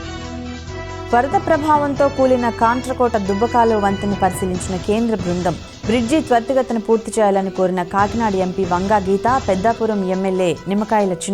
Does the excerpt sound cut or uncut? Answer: uncut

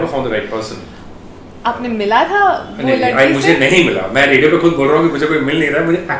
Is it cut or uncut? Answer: uncut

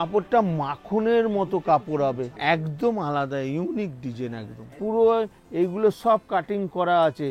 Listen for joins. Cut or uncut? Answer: cut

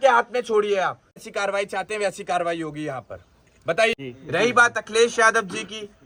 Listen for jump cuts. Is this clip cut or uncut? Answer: cut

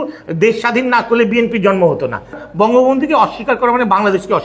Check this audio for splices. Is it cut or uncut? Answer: cut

